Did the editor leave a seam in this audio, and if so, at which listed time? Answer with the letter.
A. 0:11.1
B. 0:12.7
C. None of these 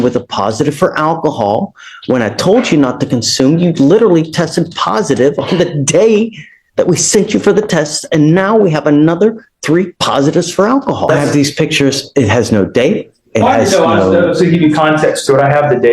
A